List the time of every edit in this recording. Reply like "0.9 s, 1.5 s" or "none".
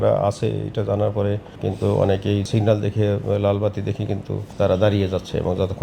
1.5 s, 2.5 s, 4.4 s

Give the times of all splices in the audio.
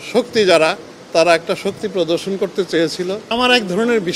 3.2 s

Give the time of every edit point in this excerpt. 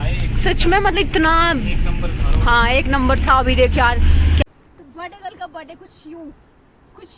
4.4 s

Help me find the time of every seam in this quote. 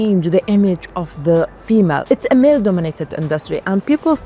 2.0 s

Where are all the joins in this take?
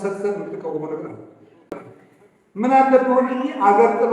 1.7 s

